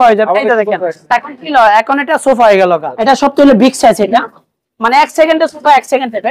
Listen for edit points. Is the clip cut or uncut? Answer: cut